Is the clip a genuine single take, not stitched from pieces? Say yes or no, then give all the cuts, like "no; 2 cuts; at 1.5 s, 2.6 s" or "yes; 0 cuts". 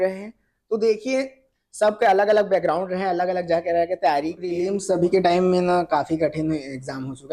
no; 1 cut; at 4.6 s